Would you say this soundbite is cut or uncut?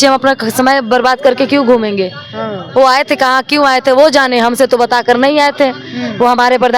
uncut